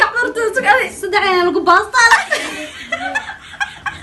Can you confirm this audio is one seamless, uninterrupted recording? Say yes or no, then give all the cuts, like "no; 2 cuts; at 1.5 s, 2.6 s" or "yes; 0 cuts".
yes; 0 cuts